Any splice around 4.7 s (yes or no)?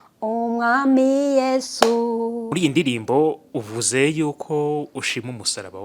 no